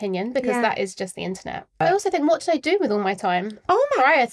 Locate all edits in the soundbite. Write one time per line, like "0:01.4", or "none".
0:01.8

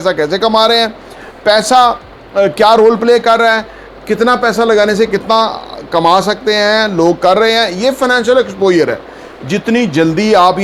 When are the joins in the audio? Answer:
none

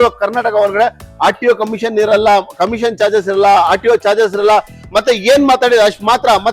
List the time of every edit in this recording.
none

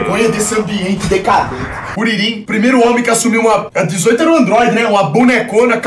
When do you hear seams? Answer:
0:02.1
0:03.7

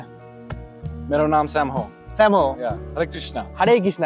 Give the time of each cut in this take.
none

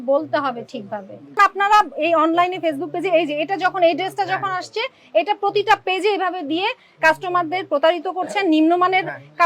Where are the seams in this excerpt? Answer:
0:01.4

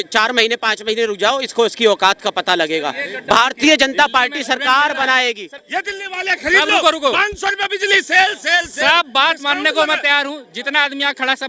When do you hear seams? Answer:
0:05.5

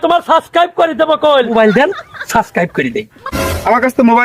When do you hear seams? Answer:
0:01.5
0:03.2

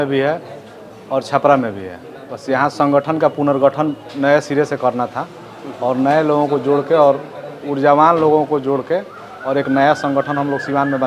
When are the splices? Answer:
none

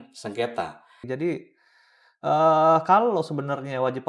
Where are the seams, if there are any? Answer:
0:01.0

